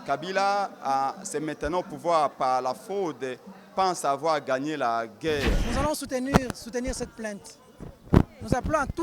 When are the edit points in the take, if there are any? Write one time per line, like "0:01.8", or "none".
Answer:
0:05.6